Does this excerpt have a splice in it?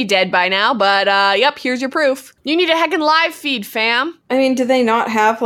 yes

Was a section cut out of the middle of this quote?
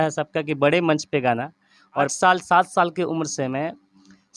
yes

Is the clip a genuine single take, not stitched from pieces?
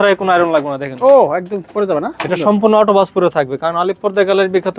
yes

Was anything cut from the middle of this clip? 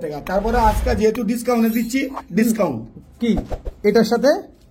no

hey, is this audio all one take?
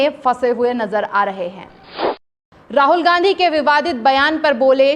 no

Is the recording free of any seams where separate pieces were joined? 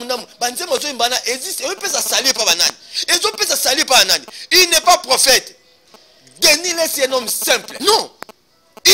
no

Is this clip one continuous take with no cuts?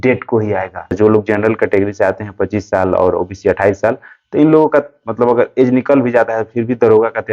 no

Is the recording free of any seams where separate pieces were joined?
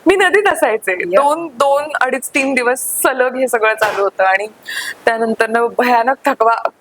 yes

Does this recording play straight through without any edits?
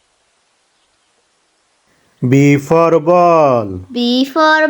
no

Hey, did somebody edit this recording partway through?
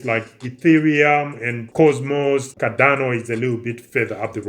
yes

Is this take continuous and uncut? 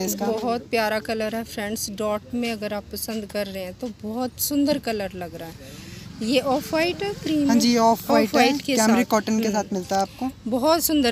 yes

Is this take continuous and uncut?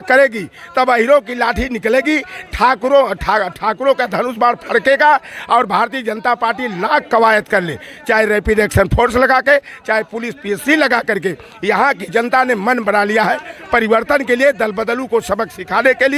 yes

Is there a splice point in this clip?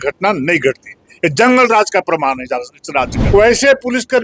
yes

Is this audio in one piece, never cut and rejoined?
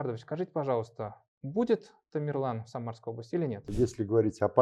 no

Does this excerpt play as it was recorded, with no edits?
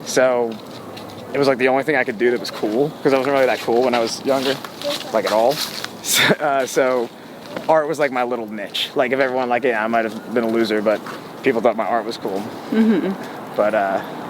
yes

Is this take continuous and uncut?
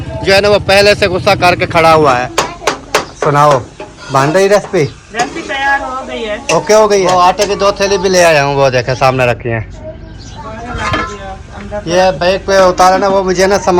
no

